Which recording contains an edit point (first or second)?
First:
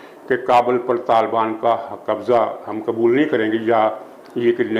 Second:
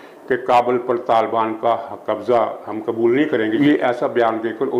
second